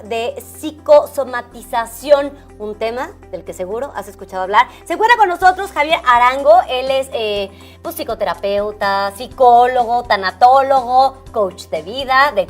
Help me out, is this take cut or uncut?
cut